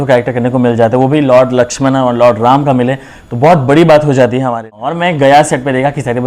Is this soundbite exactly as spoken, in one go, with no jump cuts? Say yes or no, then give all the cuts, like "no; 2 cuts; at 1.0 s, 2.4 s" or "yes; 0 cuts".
no; 1 cut; at 4.8 s